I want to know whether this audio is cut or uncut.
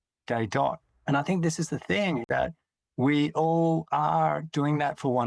cut